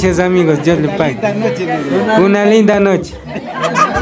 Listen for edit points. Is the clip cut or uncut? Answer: uncut